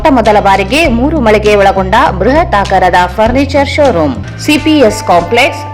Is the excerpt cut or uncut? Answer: cut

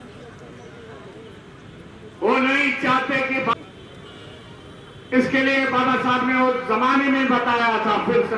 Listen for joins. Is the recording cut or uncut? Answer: cut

